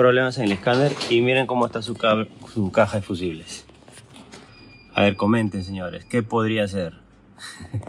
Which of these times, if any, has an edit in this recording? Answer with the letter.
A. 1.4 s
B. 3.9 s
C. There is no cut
C